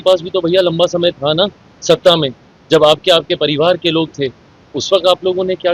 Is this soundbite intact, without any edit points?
yes; 0 cuts

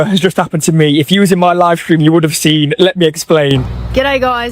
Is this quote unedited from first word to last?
no; 1 cut; at 3.6 s

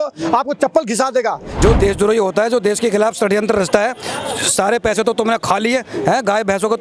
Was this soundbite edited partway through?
yes; 1 cut; at 1.5 s

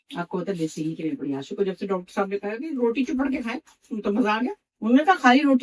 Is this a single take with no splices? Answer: no; 1 cut; at 4.7 s

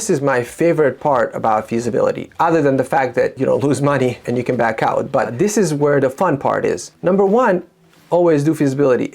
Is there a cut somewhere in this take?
yes; 4 cuts; at 3.4 s, 4.2 s, 5.3 s, 6.9 s

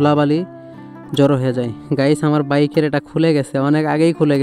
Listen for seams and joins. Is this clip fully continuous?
yes; 0 cuts

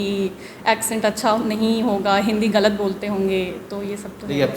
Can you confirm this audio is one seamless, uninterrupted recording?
yes; 0 cuts

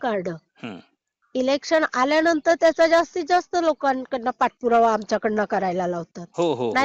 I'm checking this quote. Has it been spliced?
no; 0 cuts

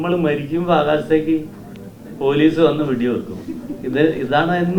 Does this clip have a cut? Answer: no; 0 cuts

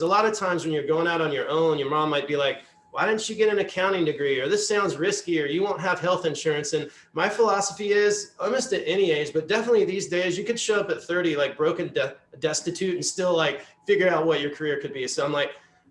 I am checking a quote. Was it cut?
no; 0 cuts

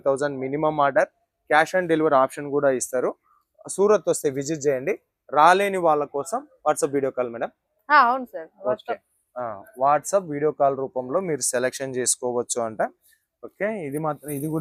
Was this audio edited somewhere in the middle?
no; 0 cuts

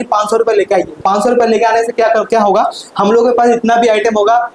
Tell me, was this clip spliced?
no; 0 cuts

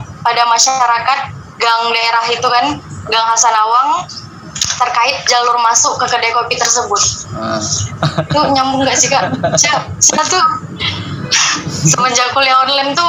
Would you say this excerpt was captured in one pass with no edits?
yes; 0 cuts

